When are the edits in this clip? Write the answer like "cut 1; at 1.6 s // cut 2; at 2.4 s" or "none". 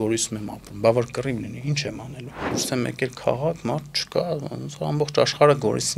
cut 1; at 2.5 s